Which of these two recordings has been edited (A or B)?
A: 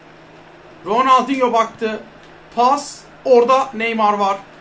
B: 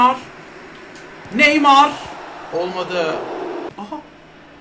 B